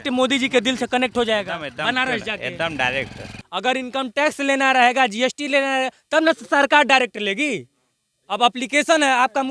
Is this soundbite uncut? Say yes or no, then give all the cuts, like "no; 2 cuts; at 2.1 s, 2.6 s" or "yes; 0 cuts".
no; 1 cut; at 3.3 s